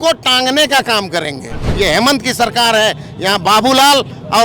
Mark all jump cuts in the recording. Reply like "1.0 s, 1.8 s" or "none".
1.6 s